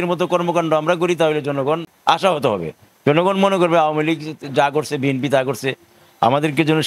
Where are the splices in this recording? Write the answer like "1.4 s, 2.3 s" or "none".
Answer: 1.9 s